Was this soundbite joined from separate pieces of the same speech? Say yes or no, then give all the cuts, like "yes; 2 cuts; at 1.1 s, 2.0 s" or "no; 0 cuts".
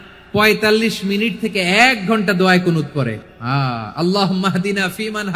yes; 1 cut; at 3.2 s